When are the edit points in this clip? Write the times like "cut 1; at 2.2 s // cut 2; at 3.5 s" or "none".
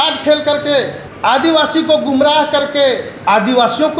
cut 1; at 1.0 s // cut 2; at 3.1 s